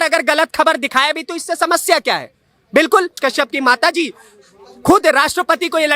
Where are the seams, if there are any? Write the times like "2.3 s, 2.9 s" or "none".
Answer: 3.1 s